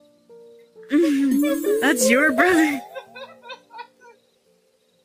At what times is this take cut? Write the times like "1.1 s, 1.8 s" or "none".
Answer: 0.9 s